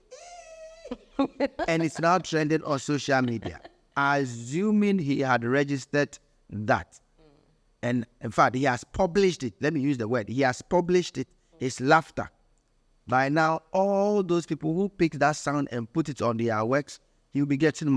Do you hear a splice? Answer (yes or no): no